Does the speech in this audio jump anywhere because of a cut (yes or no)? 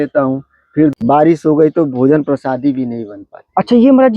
yes